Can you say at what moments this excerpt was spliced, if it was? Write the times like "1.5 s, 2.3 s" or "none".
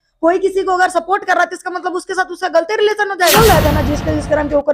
3.3 s